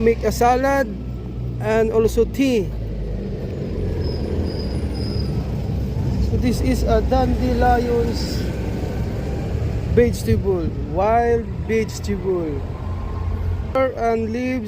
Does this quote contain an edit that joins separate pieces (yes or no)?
yes